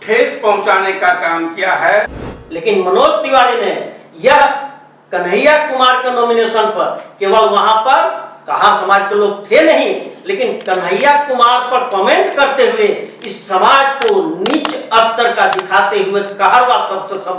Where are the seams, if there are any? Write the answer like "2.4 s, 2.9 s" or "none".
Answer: 2.3 s

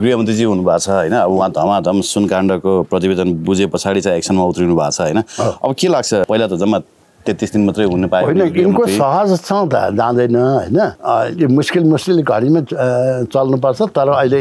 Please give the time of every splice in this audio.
6.2 s, 10.9 s

